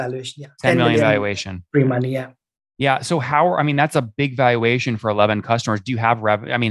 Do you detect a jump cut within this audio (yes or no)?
no